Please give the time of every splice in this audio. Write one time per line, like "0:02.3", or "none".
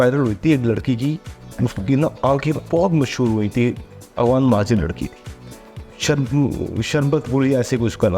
none